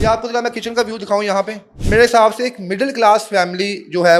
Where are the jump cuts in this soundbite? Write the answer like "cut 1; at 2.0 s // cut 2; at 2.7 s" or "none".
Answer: none